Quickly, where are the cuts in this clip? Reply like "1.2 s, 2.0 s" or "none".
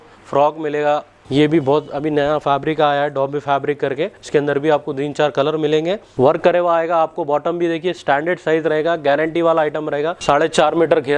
1.2 s, 4.2 s, 6.1 s, 10.2 s